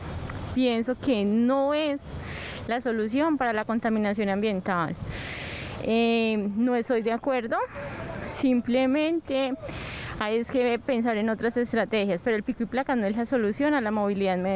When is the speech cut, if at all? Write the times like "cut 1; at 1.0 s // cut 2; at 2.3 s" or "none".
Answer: none